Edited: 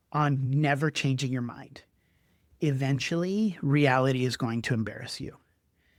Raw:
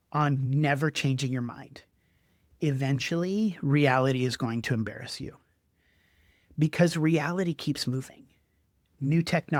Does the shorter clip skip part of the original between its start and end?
no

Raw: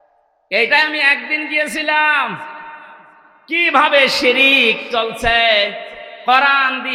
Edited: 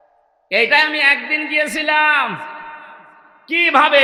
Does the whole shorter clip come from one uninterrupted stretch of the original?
yes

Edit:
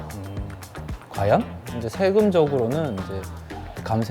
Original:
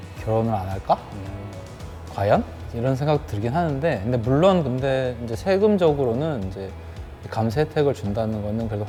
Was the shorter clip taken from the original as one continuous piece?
no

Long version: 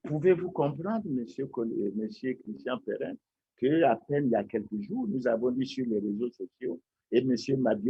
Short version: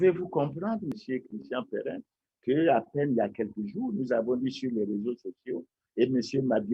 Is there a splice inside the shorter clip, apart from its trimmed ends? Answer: yes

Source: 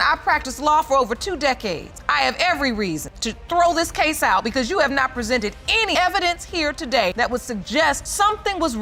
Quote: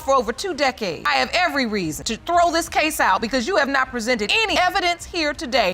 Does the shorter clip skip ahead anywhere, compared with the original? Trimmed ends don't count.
yes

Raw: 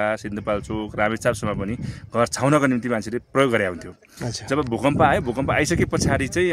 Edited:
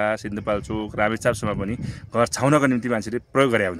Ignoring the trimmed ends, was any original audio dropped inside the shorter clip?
no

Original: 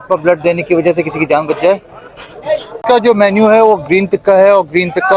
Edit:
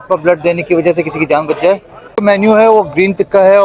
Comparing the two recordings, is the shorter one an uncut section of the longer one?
no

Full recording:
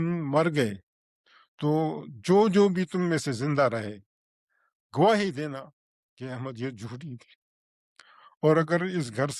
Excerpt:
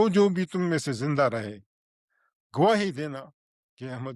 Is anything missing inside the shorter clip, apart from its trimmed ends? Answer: no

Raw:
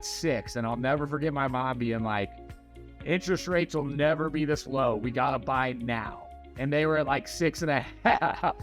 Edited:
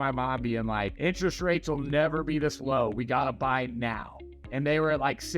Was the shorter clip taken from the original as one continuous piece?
no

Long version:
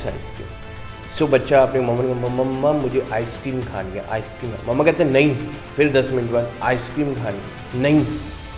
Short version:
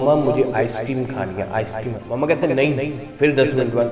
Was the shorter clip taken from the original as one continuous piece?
yes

